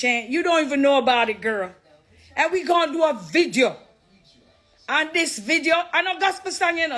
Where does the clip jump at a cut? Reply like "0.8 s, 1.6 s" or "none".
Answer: none